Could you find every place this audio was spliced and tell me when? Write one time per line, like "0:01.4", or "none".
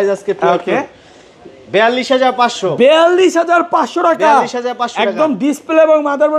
none